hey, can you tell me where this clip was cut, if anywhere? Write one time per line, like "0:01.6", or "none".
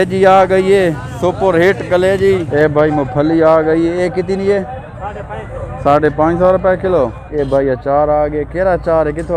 0:02.5
0:07.2